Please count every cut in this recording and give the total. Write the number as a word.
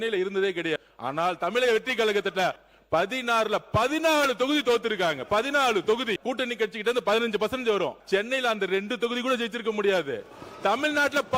four